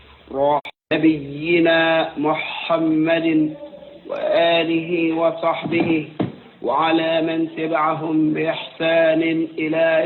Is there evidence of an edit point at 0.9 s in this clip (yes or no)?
yes